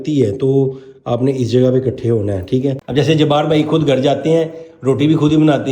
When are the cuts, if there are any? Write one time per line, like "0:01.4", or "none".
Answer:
0:02.8